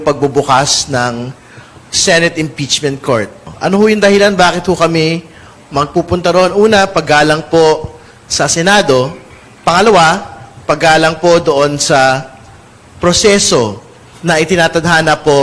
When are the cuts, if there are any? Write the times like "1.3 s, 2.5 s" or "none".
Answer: 3.5 s